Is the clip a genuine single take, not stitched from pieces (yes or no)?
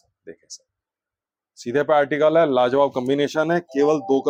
yes